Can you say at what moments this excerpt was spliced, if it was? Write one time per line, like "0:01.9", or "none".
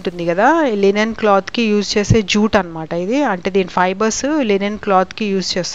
none

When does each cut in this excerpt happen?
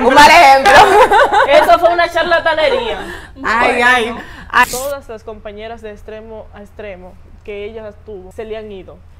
0:04.6
0:08.3

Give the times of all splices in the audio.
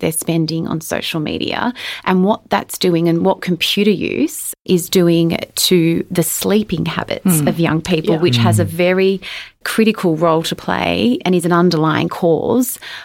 0:04.5

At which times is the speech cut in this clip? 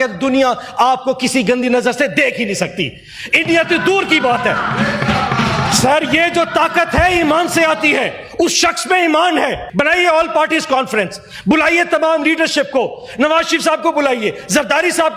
0:09.6

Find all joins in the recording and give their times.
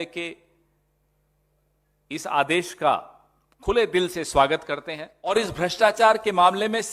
0:05.3

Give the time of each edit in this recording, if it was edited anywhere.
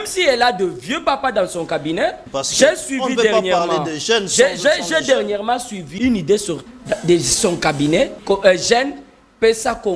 0:02.3
0:05.9
0:06.7
0:08.2

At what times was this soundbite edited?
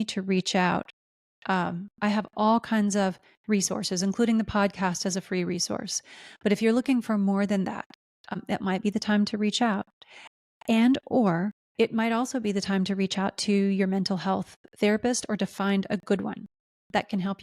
0:08.3
0:11.6

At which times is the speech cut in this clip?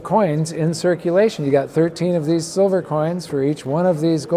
none

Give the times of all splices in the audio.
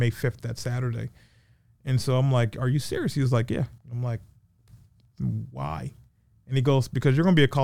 0:03.8

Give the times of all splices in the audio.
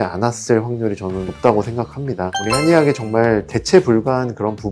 0:02.3

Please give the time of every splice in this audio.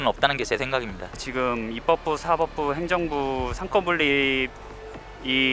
0:01.2

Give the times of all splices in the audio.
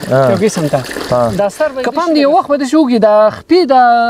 0:01.8

